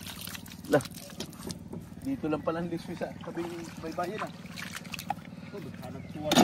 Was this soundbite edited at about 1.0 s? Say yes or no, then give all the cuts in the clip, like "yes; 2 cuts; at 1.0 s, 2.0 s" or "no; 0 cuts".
no; 0 cuts